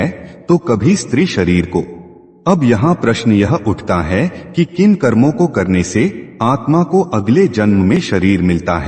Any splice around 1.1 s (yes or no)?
no